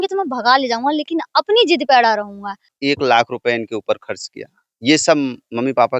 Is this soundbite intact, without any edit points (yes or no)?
no